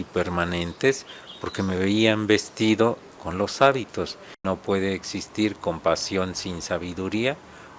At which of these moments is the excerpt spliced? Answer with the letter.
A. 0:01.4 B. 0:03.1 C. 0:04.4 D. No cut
C